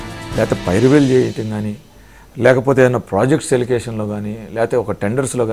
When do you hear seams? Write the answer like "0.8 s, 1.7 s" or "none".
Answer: none